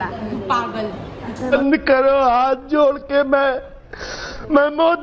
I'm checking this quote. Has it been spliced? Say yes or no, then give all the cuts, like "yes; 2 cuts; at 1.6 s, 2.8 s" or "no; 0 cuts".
yes; 1 cut; at 1.5 s